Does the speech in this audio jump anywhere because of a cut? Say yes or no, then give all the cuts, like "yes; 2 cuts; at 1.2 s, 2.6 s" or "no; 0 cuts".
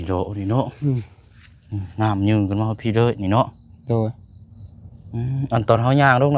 no; 0 cuts